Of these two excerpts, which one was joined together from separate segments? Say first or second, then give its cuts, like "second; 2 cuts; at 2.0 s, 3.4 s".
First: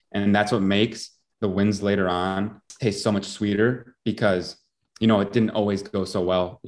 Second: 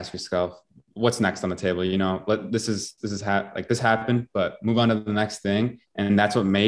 first; 1 cut; at 2.6 s